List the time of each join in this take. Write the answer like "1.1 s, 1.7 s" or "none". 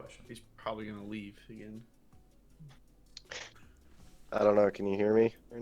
none